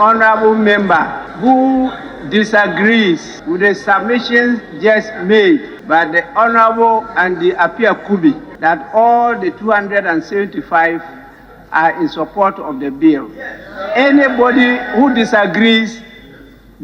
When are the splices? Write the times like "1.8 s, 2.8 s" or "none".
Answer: 1.2 s, 3.3 s, 5.7 s, 8.5 s